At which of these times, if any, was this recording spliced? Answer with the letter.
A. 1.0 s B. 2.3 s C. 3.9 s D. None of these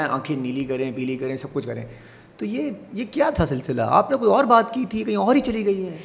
D